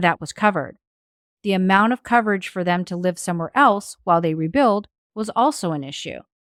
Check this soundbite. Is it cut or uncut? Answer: uncut